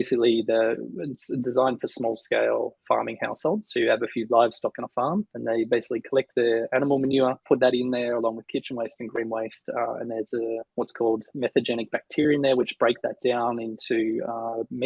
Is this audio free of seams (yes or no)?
yes